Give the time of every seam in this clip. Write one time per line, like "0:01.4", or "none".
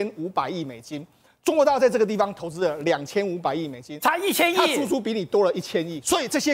none